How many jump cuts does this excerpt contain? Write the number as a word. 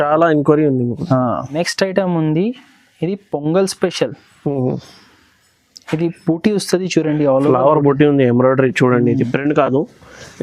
one